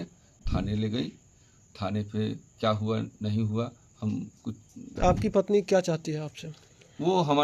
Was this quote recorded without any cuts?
no; 1 cut; at 4.8 s

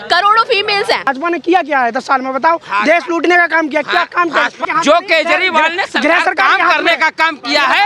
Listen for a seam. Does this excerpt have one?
yes; 2 cuts; at 1.1 s, 4.6 s

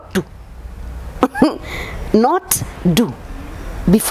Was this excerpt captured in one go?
yes; 0 cuts

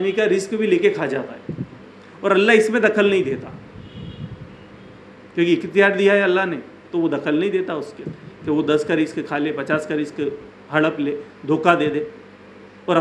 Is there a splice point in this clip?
no; 0 cuts

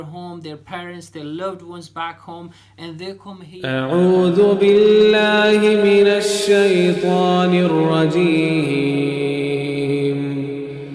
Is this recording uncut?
no; 1 cut; at 3.6 s

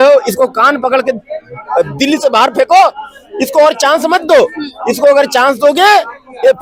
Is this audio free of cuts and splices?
yes; 0 cuts

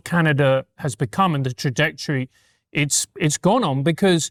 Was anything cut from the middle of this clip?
no; 0 cuts

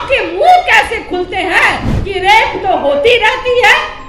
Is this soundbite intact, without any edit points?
no; 1 cut; at 1.9 s

